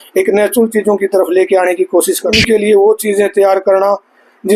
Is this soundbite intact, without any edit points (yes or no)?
no